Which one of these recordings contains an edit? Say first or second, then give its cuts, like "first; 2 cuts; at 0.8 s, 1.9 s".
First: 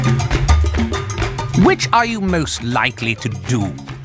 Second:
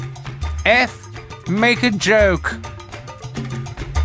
first; 1 cut; at 1.2 s